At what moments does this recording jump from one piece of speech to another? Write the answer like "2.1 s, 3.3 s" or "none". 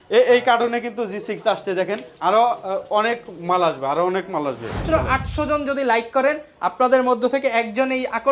4.8 s